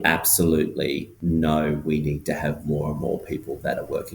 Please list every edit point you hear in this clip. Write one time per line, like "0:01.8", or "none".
0:01.1